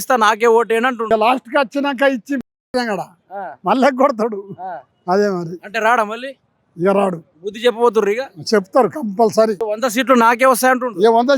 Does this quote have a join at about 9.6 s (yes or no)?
yes